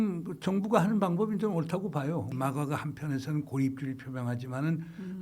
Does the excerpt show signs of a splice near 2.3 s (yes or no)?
yes